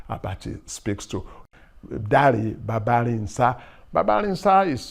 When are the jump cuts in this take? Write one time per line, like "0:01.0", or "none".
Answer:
0:01.4

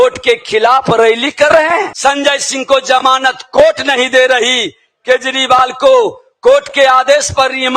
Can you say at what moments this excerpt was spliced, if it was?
0:01.9

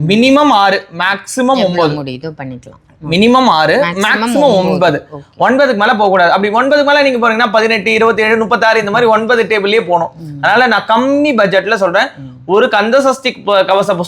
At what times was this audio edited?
none

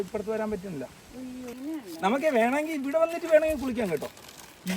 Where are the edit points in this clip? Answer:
0:01.5

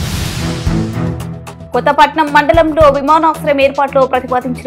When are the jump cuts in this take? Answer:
0:01.6

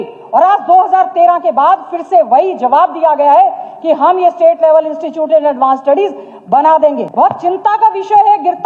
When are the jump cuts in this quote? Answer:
0:07.0

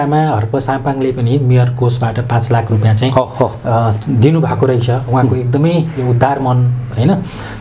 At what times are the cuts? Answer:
none

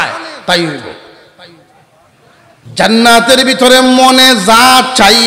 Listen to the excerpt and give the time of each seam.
0:02.6

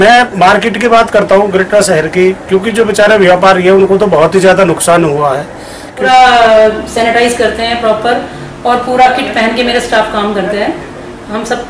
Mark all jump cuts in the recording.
0:06.0

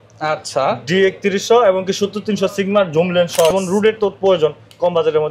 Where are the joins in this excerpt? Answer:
0:03.5

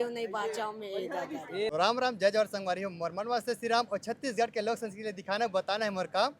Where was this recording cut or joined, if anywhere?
0:01.7

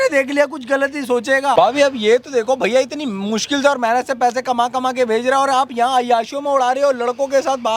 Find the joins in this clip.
0:01.5

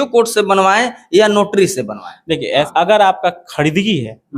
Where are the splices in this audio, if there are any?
0:02.7

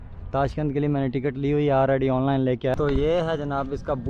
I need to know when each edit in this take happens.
0:02.7

